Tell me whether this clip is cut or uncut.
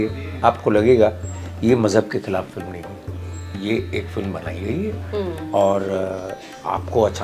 uncut